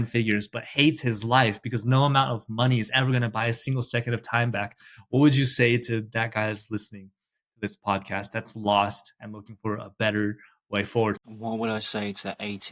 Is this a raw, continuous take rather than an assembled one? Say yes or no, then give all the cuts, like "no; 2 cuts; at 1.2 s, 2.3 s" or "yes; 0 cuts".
no; 1 cut; at 11.2 s